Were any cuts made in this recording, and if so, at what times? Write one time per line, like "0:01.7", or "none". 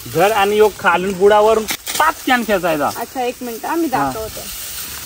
0:01.7